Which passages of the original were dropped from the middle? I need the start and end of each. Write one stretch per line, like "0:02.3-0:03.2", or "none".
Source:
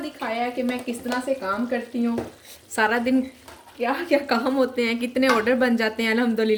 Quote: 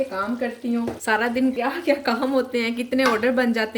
0:02.3-0:02.7
0:03.3-0:03.8